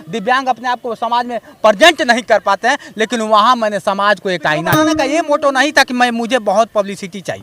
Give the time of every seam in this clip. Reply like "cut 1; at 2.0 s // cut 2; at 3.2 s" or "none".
cut 1; at 4.9 s